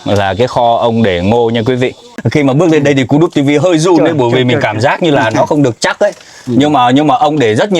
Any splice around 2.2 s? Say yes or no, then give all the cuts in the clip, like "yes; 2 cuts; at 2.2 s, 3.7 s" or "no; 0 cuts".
yes; 1 cut; at 2.2 s